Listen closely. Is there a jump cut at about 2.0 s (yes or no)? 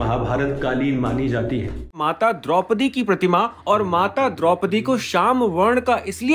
yes